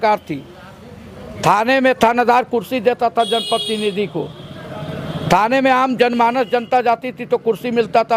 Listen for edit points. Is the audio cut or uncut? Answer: uncut